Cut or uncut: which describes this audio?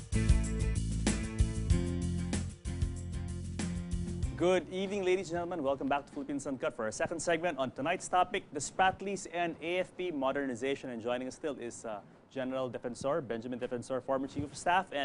uncut